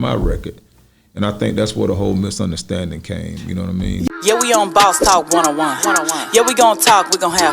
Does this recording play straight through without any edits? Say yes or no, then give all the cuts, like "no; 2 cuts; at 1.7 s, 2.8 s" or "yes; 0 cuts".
no; 1 cut; at 4.1 s